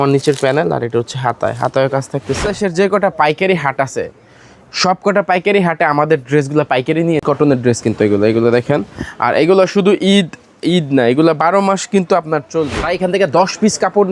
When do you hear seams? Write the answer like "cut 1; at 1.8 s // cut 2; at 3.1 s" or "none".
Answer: cut 1; at 2.4 s // cut 2; at 7.2 s // cut 3; at 12.8 s